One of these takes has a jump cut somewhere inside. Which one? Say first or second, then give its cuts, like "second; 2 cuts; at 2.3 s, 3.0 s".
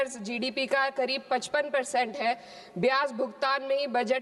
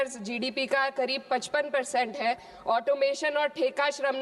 second; 1 cut; at 2.5 s